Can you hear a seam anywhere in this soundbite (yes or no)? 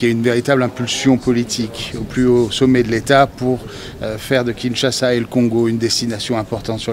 no